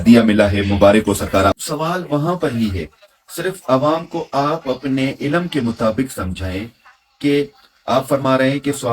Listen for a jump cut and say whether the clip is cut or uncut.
cut